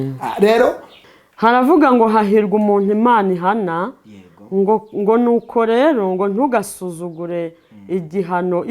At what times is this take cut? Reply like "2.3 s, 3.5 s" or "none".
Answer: 0.9 s